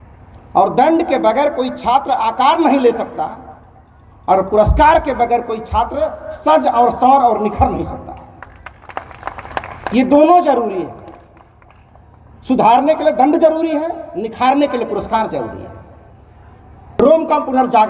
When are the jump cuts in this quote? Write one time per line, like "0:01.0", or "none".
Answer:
0:17.0